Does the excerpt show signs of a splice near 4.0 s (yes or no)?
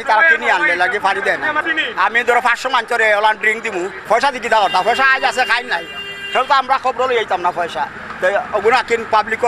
yes